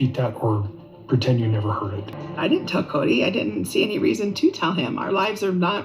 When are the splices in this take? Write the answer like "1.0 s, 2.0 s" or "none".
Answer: 2.1 s

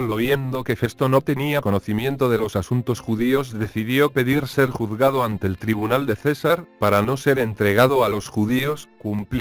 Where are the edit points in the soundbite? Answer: 4.5 s

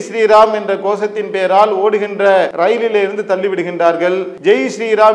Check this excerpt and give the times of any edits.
2.5 s, 4.3 s

